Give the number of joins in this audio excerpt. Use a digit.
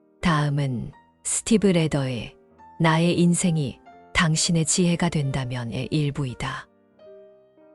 1